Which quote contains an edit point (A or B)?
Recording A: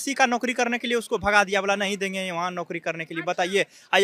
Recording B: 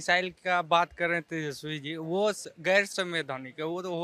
B